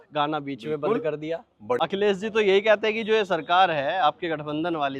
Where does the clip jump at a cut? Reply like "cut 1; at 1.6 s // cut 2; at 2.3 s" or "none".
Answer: cut 1; at 1.8 s